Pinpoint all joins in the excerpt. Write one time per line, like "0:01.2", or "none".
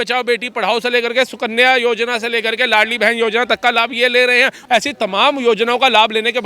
0:04.6